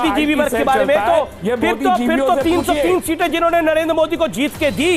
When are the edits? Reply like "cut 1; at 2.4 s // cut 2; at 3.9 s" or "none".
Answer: none